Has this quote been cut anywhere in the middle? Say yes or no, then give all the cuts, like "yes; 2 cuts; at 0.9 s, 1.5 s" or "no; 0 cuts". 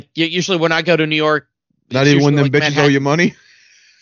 no; 0 cuts